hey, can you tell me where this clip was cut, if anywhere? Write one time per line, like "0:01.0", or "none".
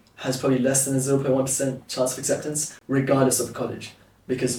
none